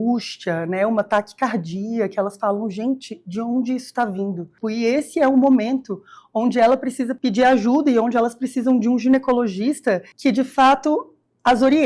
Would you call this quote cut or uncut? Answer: cut